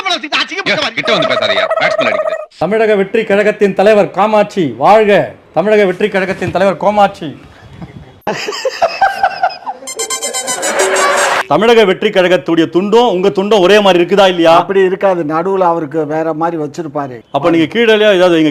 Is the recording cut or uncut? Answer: uncut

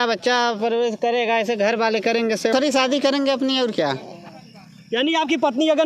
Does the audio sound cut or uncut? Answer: cut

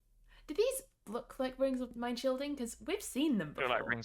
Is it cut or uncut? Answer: cut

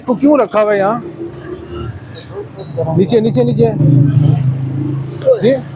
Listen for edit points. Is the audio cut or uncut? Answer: uncut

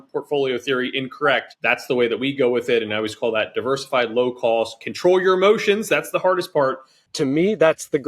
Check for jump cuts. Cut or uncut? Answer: cut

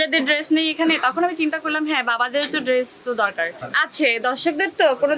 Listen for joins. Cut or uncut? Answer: cut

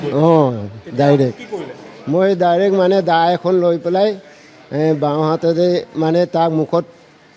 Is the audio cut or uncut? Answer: uncut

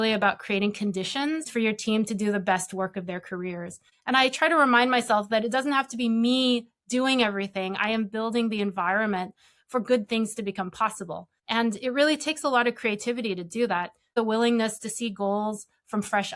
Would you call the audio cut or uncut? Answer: cut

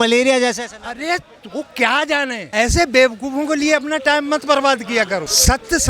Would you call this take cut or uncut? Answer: uncut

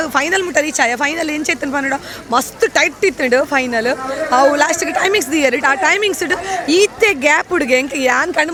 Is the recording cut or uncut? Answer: uncut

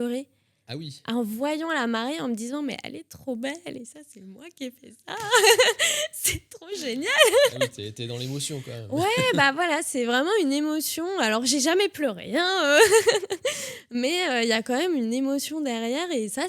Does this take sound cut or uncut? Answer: uncut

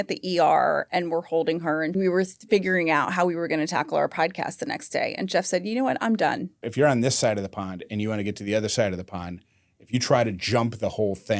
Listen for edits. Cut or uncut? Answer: cut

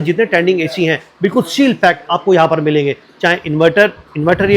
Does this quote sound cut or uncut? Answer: uncut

